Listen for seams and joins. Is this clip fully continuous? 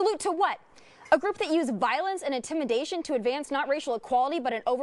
yes; 0 cuts

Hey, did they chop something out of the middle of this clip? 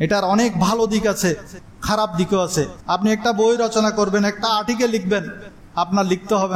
yes; 1 cut; at 2.8 s

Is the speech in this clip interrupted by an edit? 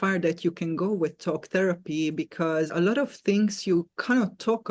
yes; 1 cut; at 2.7 s

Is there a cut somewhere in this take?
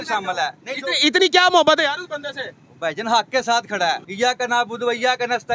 yes; 1 cut; at 4.1 s

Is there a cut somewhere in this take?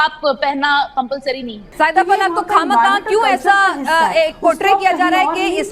no; 0 cuts

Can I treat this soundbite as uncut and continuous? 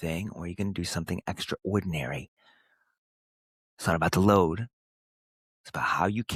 yes; 0 cuts

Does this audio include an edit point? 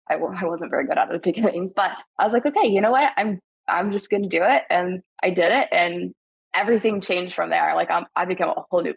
no; 0 cuts

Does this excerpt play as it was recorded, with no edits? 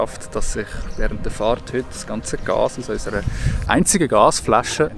yes; 0 cuts

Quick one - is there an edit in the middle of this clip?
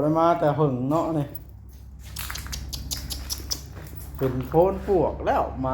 no; 0 cuts

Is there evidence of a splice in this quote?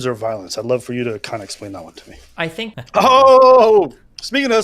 yes; 1 cut; at 2.7 s

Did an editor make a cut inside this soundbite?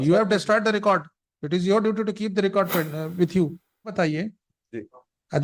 yes; 1 cut; at 3.9 s

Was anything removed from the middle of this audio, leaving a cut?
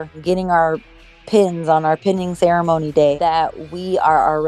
yes; 1 cut; at 3.2 s

